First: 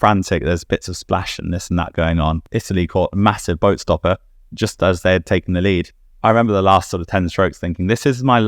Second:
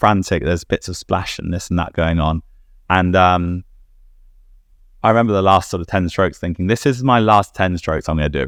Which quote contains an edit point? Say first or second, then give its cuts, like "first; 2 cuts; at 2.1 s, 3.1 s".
first; 2 cuts; at 2.5 s, 6.0 s